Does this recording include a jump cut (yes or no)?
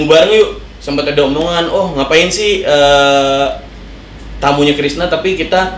no